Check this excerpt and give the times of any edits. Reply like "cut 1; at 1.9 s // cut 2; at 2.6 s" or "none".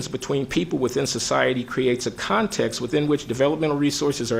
none